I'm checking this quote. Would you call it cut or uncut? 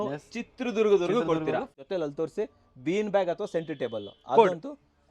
cut